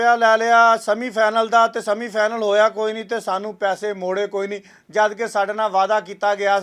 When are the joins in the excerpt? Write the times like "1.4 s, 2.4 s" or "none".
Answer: none

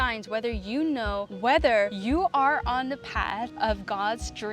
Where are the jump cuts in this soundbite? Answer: 1.3 s, 2.0 s, 3.5 s

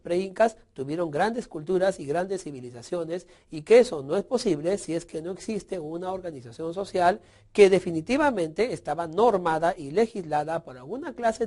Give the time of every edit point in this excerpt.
3.1 s

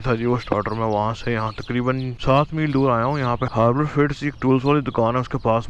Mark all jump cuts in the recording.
2.1 s

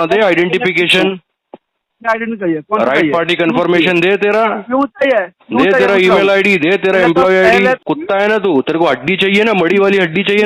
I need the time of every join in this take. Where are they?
7.8 s

